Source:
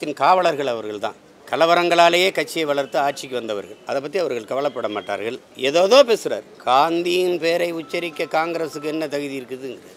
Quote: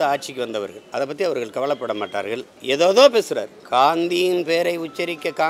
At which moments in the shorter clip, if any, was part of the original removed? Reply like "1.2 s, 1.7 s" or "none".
none